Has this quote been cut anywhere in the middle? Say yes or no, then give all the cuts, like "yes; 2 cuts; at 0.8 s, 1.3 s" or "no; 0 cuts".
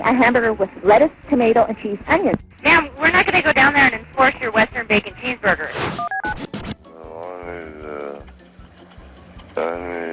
yes; 3 cuts; at 2.5 s, 5.7 s, 6.9 s